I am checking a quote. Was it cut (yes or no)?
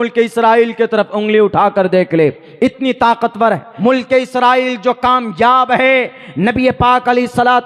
yes